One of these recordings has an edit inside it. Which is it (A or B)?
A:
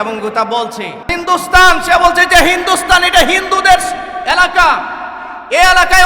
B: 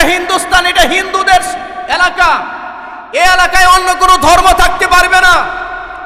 A